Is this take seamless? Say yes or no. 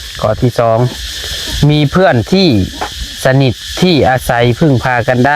yes